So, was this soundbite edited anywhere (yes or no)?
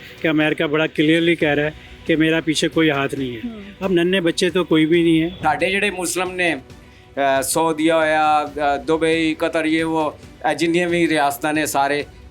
yes